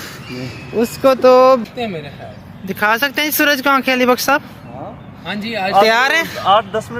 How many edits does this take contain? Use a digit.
1